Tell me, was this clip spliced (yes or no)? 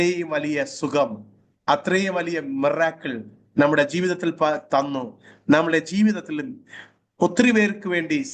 no